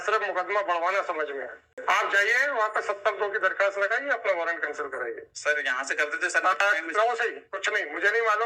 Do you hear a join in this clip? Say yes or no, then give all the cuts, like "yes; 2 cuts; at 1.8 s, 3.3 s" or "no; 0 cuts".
yes; 1 cut; at 1.8 s